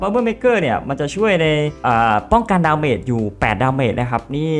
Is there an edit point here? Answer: no; 0 cuts

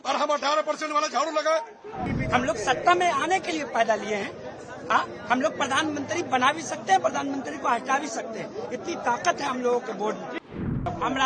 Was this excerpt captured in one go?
no; 2 cuts; at 2.1 s, 10.4 s

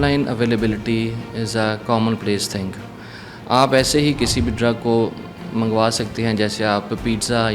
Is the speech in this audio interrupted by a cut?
no; 0 cuts

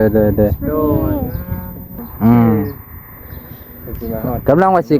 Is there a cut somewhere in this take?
yes; 1 cut; at 2.0 s

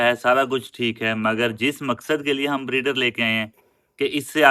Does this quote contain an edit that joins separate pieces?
no; 0 cuts

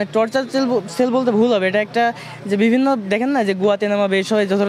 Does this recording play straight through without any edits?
yes; 0 cuts

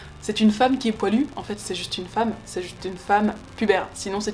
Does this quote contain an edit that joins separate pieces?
no; 0 cuts

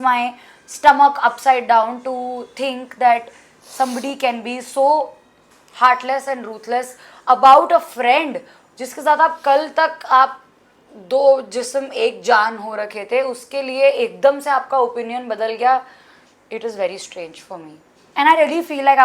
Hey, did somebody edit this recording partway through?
no; 0 cuts

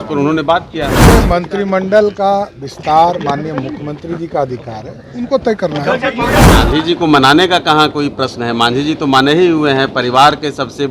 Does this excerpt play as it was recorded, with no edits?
no; 2 cuts; at 1.2 s, 6.4 s

